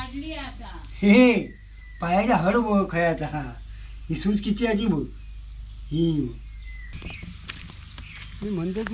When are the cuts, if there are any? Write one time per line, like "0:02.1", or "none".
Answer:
0:06.9

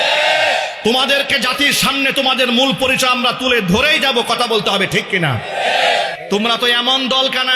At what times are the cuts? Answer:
0:06.2

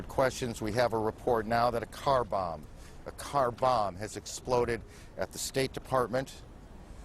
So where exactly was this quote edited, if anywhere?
0:02.5

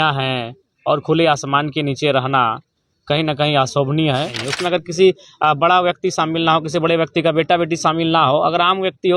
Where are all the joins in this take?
0:04.4

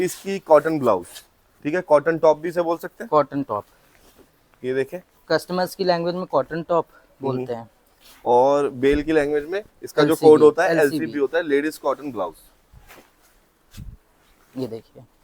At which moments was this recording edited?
none

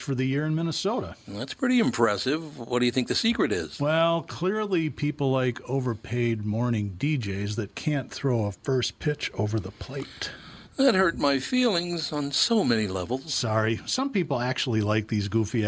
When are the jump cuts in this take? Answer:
none

